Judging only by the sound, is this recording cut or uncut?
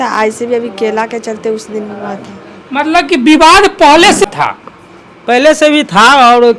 cut